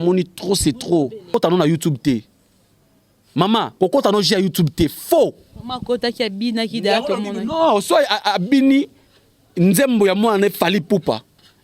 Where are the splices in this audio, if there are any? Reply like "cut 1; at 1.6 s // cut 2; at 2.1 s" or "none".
cut 1; at 1.3 s